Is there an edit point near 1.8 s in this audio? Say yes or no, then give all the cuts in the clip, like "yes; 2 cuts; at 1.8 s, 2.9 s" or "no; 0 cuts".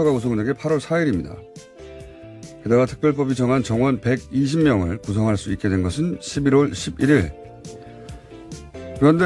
no; 1 cut; at 6.0 s